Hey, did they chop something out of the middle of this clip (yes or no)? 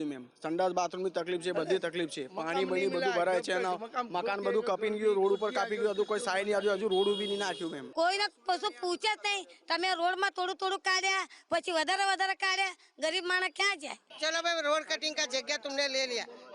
yes